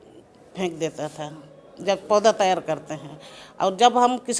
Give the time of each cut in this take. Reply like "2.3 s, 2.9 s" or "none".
none